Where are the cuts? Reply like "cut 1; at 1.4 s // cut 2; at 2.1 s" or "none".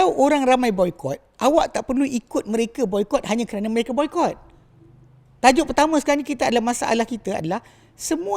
none